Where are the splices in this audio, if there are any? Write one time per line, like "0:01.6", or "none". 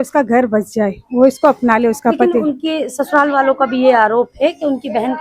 none